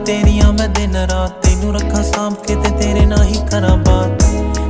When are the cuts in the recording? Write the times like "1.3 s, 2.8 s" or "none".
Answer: none

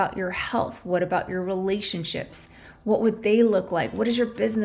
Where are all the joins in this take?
none

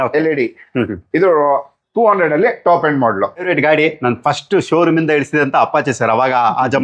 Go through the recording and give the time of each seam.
3.5 s

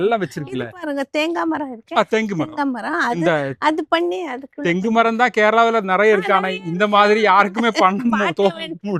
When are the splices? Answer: none

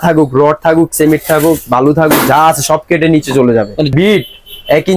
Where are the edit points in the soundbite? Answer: 3.9 s

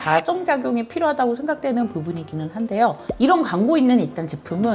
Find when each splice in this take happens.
3.0 s

